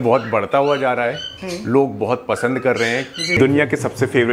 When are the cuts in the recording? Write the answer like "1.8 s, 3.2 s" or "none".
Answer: 3.4 s

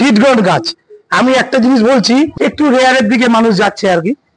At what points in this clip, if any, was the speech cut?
2.3 s

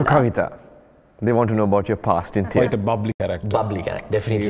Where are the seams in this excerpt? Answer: 2.6 s

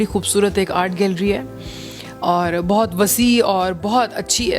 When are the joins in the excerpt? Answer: none

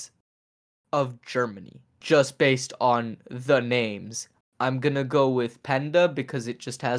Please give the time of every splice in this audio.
2.0 s

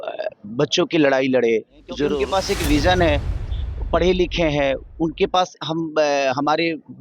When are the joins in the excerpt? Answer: 2.2 s

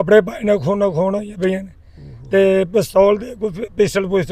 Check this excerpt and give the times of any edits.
none

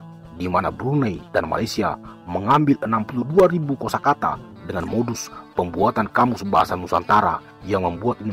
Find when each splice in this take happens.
none

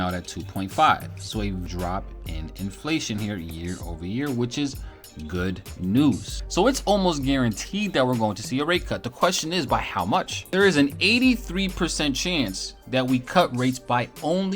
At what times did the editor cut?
1.6 s, 6.3 s, 10.4 s

